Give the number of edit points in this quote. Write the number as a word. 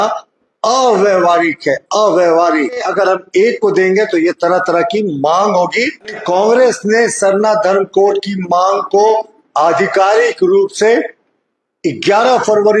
two